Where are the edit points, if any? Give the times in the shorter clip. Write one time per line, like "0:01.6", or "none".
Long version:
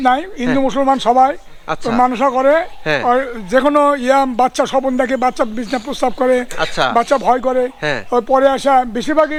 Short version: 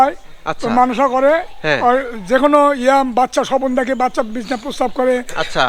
none